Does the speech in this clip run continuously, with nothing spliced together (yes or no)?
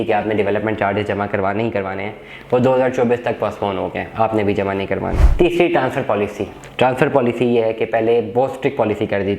no